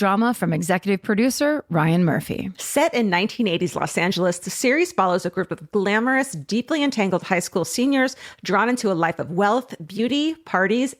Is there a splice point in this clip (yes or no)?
no